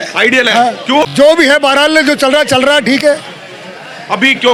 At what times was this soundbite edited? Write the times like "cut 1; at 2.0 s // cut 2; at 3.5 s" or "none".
none